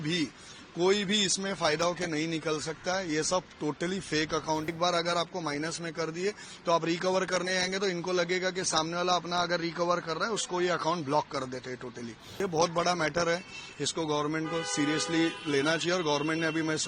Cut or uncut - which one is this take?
cut